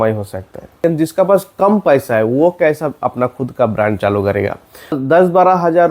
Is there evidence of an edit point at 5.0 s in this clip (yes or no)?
yes